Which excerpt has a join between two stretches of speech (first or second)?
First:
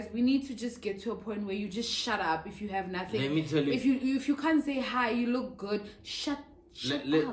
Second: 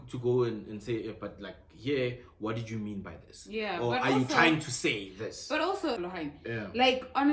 second